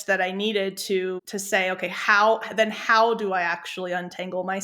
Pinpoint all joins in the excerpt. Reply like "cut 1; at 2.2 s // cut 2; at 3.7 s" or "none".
cut 1; at 1.3 s